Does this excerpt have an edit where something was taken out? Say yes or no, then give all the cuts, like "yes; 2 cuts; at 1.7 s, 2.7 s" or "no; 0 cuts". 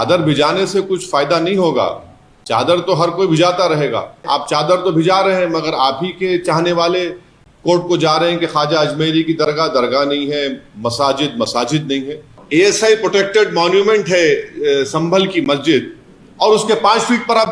yes; 2 cuts; at 4.2 s, 12.3 s